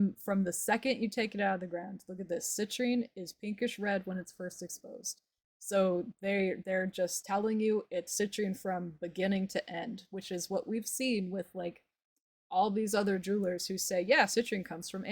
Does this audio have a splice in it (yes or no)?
no